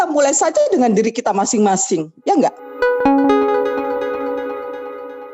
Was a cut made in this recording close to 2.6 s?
yes; 1 cut; at 2.6 s

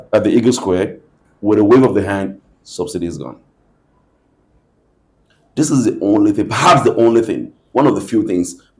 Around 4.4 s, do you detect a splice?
no; 0 cuts

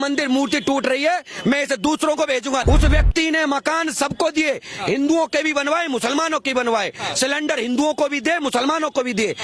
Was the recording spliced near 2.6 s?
yes; 1 cut; at 2.6 s

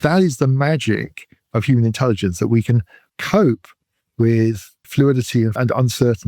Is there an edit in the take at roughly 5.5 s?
yes; 3 cuts; at 3.0 s, 4.7 s, 5.5 s

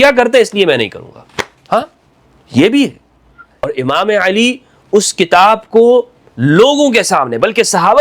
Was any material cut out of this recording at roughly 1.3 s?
no; 1 cut; at 3.7 s

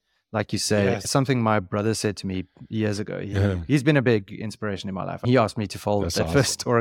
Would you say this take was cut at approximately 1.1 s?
yes; 1 cut; at 1.1 s

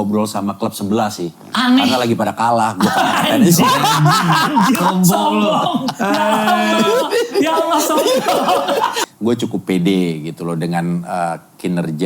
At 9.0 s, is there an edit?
yes; 1 cut; at 9.0 s

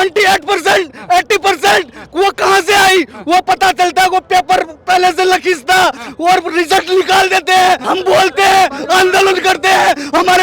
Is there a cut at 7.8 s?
yes; 1 cut; at 7.8 s

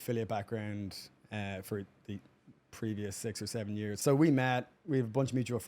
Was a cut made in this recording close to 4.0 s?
yes; 1 cut; at 4.0 s

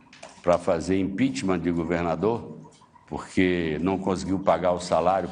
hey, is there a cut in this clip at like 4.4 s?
no; 1 cut; at 2.2 s

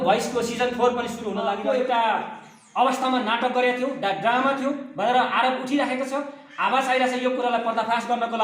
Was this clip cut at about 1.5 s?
yes; 1 cut; at 1.5 s

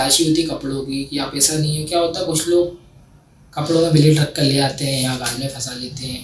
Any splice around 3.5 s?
no; 0 cuts

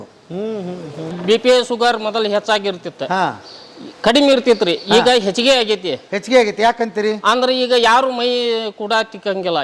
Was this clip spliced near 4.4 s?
no; 1 cut; at 1.2 s

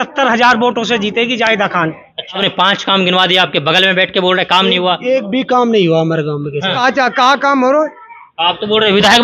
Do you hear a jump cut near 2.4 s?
yes; 2 cuts; at 2.4 s, 6.8 s

